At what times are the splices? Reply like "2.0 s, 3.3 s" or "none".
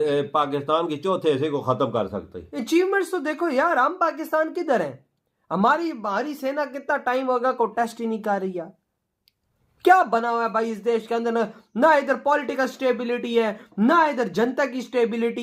none